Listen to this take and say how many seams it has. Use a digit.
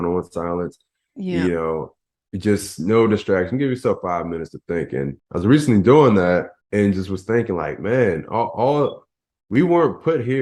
2